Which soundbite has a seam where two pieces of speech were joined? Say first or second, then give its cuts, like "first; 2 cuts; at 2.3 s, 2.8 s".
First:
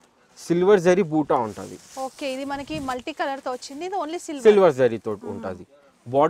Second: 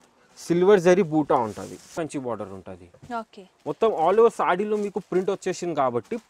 second; 1 cut; at 1.9 s